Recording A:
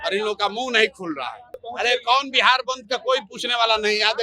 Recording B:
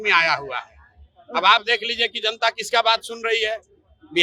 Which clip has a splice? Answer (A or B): A